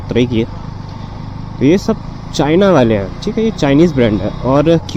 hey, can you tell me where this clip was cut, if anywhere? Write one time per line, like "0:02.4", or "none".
none